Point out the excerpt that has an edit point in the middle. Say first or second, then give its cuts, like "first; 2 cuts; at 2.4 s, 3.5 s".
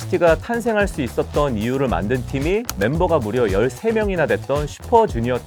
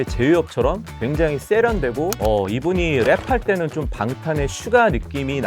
second; 1 cut; at 2.2 s